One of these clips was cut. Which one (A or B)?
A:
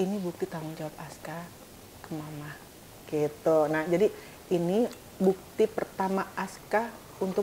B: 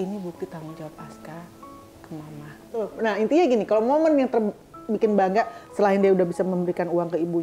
B